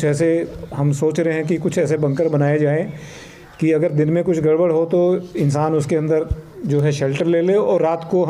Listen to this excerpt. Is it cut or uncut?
uncut